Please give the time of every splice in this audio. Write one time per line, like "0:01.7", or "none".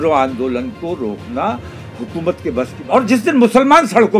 0:02.8